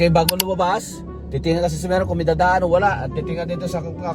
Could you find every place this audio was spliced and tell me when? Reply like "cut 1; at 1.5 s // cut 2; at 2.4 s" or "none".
none